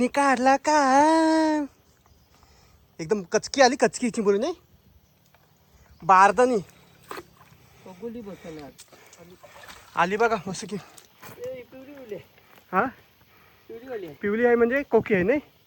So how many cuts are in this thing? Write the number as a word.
zero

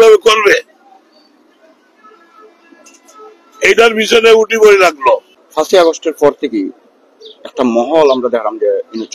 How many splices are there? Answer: one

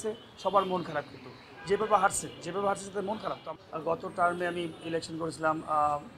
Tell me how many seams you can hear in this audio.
one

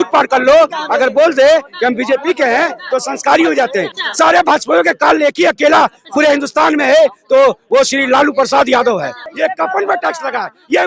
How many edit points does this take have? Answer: two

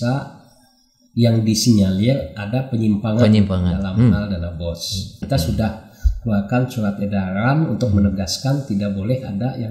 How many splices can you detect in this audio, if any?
one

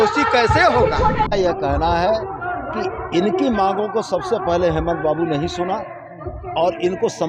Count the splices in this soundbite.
one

